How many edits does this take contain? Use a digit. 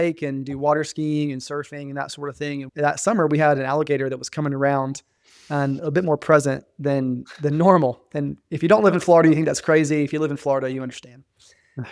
1